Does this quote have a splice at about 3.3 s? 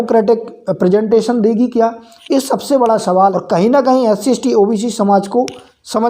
yes; 1 cut; at 3.3 s

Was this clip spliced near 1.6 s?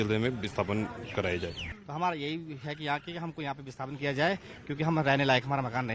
yes; 1 cut; at 1.6 s

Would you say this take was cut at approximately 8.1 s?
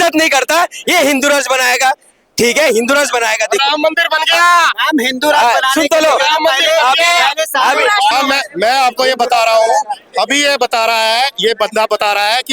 yes; 1 cut; at 8.1 s

